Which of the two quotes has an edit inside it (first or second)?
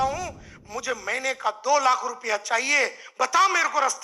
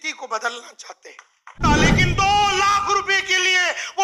second